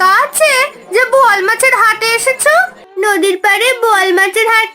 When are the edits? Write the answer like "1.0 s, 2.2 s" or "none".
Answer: 2.8 s